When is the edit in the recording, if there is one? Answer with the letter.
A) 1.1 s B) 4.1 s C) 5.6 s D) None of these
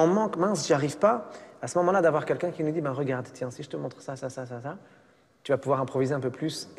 D